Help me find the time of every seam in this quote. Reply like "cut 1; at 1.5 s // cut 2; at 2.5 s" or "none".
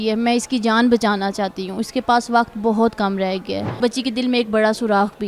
cut 1; at 3.8 s